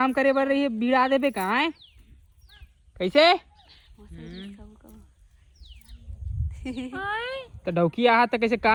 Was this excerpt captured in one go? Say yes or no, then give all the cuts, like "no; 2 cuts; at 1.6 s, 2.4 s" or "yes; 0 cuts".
yes; 0 cuts